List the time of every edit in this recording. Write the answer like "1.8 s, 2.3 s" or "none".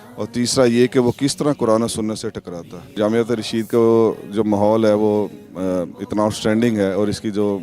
2.9 s